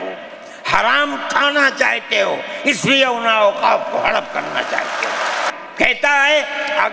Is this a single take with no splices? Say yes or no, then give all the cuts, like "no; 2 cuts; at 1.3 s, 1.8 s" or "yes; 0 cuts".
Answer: no; 1 cut; at 5.5 s